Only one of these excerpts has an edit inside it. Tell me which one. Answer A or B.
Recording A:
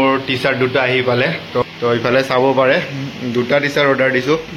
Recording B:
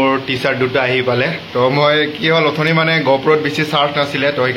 A